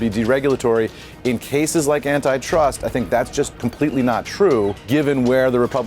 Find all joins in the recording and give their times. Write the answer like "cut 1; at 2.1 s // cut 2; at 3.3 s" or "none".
cut 1; at 3.5 s // cut 2; at 4.8 s